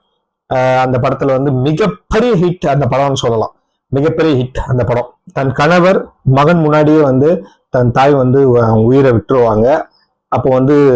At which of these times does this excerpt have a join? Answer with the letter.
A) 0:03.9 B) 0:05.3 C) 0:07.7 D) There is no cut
B